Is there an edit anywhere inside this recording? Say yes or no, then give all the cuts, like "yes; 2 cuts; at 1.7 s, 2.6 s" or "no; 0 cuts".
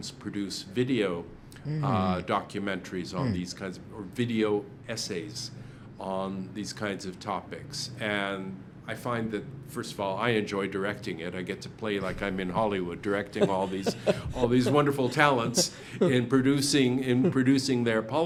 no; 0 cuts